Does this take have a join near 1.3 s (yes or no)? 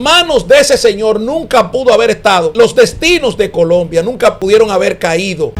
no